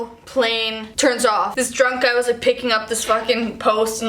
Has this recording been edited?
yes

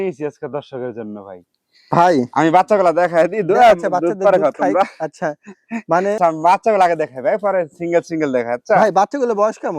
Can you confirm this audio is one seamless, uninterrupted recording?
no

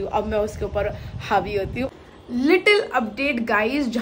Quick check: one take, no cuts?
no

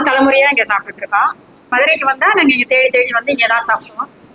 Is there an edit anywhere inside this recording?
yes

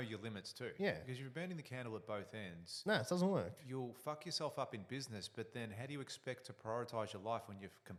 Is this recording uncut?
yes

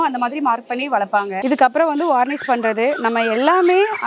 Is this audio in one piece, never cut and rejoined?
no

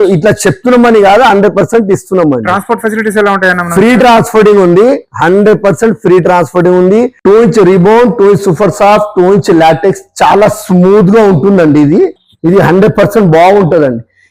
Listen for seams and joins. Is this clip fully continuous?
no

